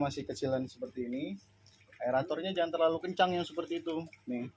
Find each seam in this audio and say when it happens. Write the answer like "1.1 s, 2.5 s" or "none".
none

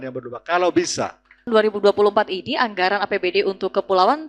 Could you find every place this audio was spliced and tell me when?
1.5 s

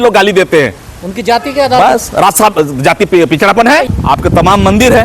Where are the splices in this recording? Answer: 3.9 s

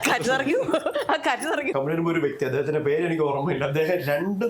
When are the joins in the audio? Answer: 1.7 s

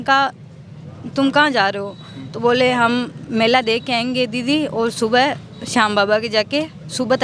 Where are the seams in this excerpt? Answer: none

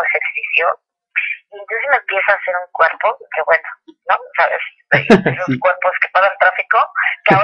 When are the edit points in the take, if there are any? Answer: 3.0 s

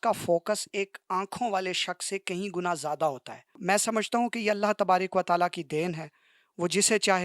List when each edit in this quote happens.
3.6 s

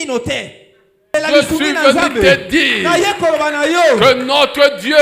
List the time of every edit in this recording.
1.1 s

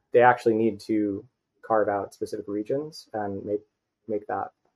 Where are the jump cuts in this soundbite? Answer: none

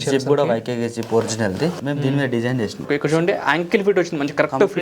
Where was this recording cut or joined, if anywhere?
1.8 s, 2.8 s

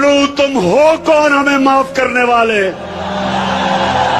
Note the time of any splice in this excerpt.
none

